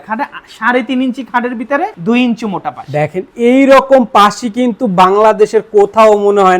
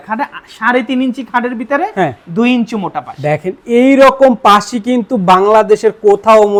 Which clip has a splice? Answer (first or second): first